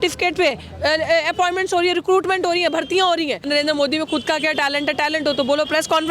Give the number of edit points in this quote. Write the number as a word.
one